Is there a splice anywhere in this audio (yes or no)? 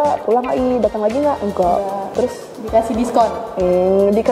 yes